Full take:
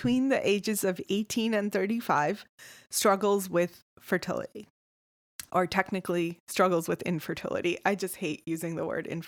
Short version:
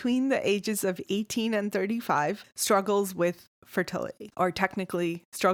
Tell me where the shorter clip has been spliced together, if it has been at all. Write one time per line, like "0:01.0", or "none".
0:02.5
0:04.2